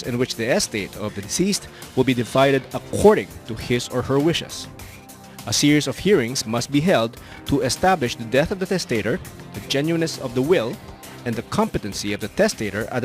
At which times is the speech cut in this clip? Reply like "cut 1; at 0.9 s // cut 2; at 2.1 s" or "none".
cut 1; at 0.9 s